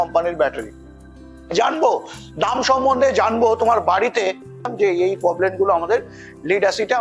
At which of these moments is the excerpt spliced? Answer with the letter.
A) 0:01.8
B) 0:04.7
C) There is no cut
B